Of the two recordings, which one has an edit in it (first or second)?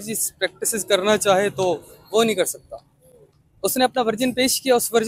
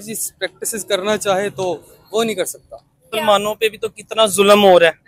second